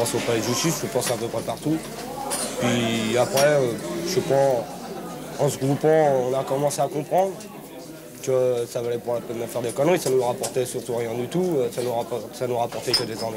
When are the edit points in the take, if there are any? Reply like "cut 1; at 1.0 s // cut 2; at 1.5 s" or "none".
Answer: none